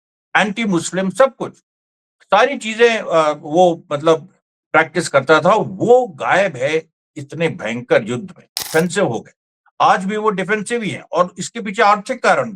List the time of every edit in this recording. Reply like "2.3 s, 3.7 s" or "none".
8.6 s